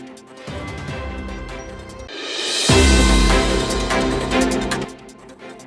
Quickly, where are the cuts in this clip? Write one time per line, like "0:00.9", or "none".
none